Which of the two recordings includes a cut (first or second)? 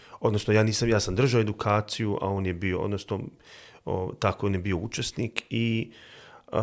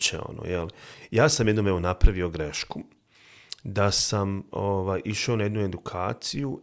second